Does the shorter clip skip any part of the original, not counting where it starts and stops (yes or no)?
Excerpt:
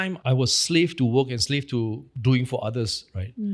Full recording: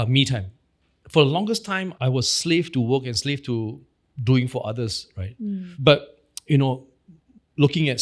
yes